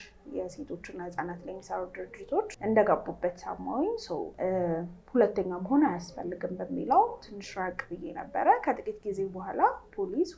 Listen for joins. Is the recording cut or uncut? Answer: cut